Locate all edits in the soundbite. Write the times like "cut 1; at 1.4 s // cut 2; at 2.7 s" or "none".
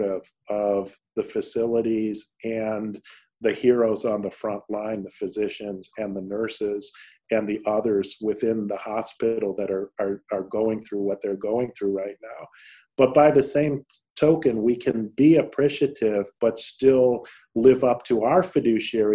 none